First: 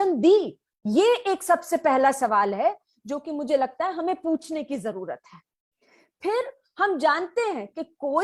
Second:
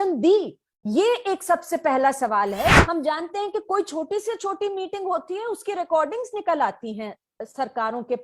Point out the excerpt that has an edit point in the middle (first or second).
second